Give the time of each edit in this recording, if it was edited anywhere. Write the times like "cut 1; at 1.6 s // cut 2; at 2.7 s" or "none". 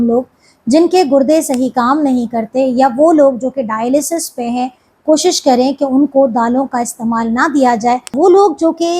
cut 1; at 8.1 s